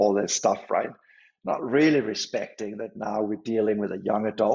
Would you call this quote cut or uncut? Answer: uncut